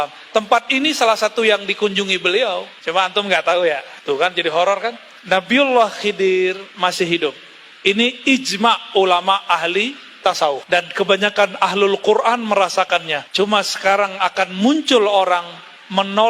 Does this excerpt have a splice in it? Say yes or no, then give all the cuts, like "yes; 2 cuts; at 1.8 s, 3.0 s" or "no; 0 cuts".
yes; 5 cuts; at 2.7 s, 3.9 s, 5.1 s, 10.6 s, 13.2 s